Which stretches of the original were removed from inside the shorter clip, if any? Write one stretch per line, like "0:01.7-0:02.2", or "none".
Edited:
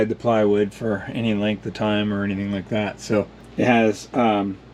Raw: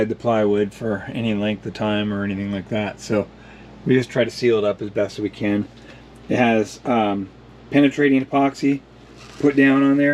0:03.4-0:06.1